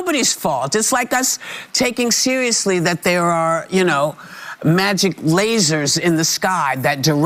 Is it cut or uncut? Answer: uncut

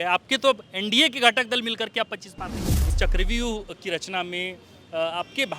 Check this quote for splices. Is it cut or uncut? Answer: cut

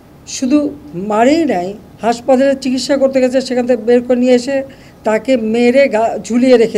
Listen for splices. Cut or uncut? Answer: uncut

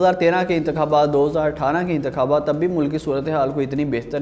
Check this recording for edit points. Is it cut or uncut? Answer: uncut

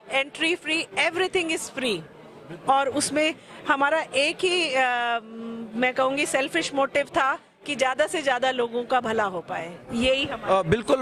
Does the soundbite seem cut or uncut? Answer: uncut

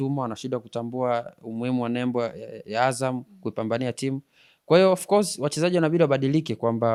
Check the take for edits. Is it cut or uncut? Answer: uncut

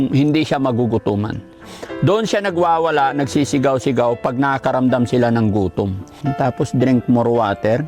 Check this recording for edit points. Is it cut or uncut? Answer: cut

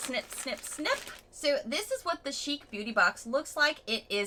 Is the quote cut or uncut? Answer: uncut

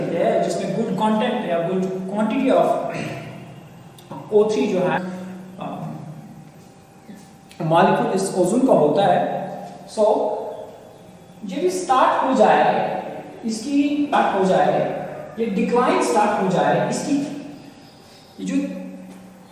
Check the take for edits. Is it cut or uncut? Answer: cut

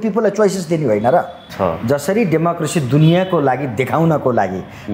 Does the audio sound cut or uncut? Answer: cut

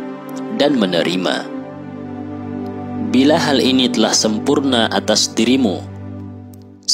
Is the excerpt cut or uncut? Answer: cut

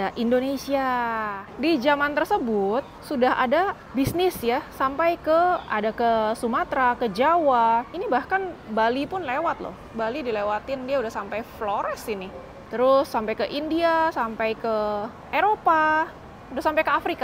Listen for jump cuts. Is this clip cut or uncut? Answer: cut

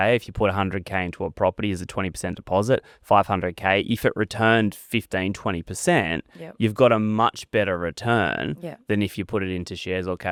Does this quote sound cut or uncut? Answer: uncut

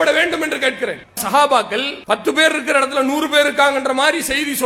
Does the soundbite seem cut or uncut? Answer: cut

